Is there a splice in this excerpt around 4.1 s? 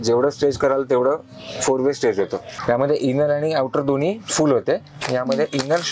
no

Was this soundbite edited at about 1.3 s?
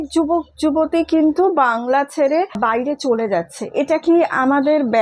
no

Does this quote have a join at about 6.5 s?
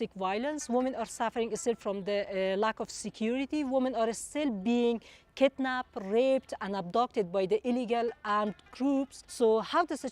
no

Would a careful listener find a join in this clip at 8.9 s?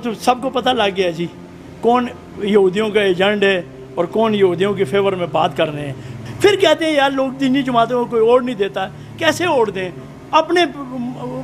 no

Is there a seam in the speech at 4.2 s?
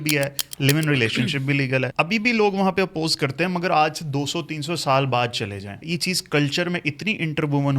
no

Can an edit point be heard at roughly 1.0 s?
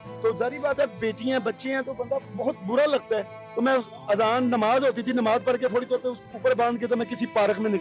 no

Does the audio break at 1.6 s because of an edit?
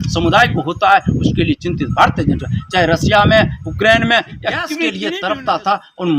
no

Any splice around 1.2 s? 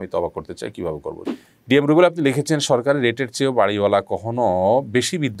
yes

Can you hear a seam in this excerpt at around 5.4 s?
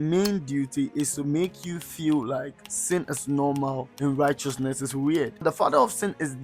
yes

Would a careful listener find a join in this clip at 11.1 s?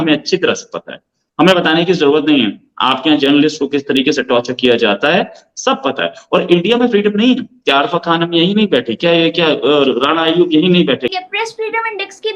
yes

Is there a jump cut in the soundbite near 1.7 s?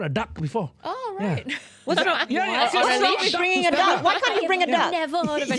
no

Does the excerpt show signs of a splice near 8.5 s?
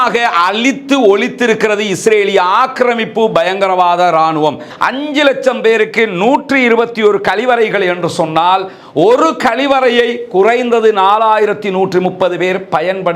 no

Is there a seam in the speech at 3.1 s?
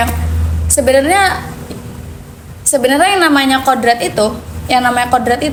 no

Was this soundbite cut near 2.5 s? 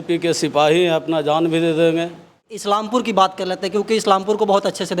yes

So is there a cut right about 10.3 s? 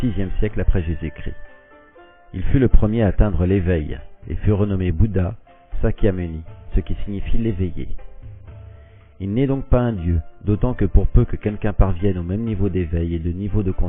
yes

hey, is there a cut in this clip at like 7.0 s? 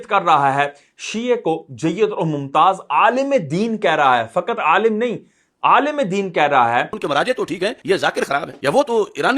yes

